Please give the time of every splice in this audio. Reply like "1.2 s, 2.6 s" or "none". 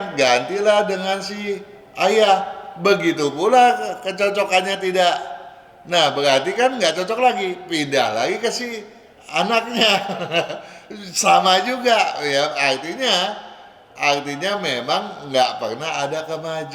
none